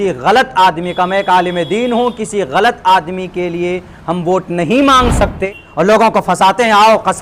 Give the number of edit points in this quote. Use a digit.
1